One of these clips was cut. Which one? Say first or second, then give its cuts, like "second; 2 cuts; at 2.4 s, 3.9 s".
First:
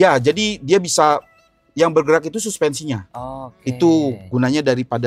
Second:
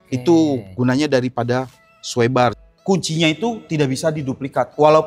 second; 1 cut; at 2.6 s